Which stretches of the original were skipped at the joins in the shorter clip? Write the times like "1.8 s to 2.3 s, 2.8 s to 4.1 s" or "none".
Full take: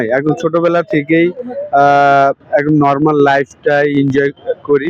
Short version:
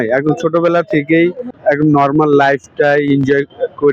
1.5 s to 2.4 s